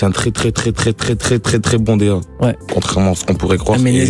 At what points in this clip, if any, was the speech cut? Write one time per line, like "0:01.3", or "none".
0:02.6